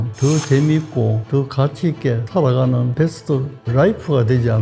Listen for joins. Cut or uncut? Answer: uncut